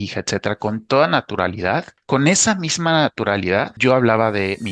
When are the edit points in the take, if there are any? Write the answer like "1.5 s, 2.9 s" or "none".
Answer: 3.7 s